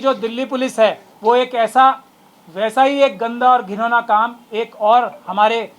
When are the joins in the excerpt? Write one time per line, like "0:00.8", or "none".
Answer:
0:01.1

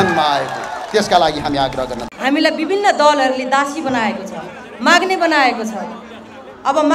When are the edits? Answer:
0:02.0

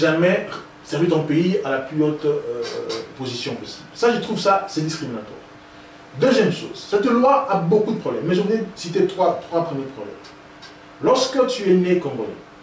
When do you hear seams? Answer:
none

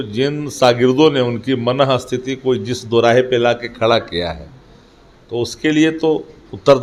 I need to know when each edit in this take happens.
none

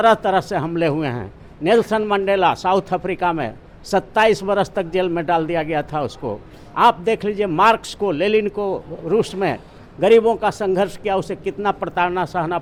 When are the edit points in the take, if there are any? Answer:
none

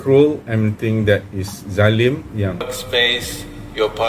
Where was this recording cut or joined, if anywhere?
0:02.6

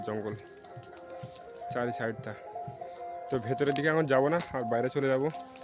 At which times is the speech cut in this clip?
0:02.9

